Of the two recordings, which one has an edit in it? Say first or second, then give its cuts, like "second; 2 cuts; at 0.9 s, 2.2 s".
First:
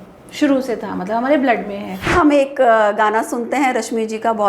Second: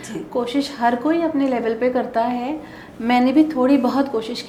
first; 1 cut; at 2.1 s